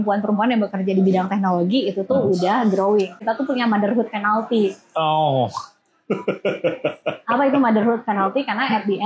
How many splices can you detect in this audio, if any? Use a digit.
1